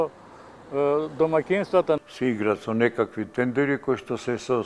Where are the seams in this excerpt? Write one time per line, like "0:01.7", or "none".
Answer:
0:02.0